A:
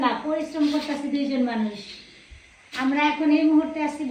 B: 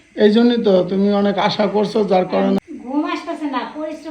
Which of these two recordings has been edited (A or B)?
B